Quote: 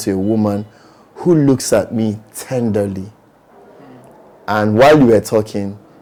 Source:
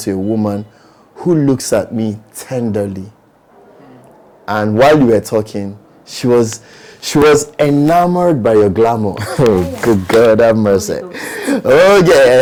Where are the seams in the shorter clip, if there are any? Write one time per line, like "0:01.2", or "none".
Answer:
none